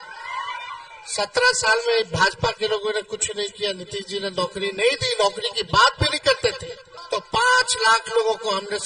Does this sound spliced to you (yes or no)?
yes